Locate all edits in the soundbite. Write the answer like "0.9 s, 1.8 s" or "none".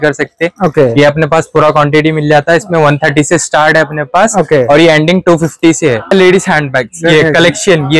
6.1 s